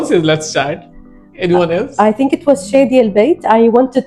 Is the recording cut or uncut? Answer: uncut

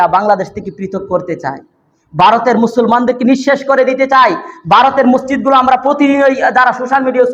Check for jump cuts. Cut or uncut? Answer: uncut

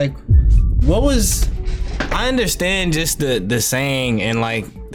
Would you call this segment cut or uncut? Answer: uncut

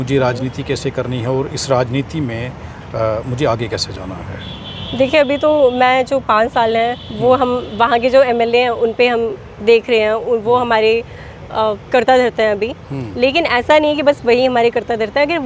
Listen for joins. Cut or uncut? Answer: uncut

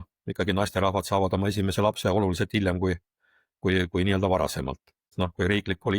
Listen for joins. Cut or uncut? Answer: cut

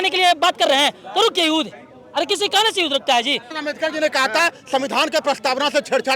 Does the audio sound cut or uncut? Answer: cut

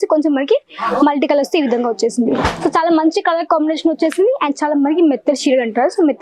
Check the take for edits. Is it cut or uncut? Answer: uncut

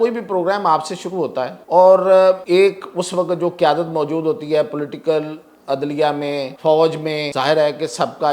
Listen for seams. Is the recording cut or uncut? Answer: cut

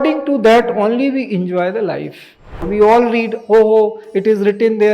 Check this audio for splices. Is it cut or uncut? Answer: cut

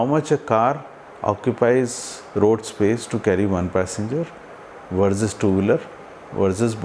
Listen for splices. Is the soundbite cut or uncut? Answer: uncut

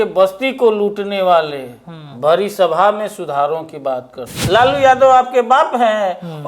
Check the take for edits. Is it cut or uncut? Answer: cut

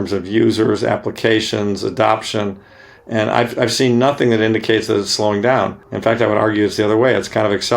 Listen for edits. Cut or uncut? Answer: cut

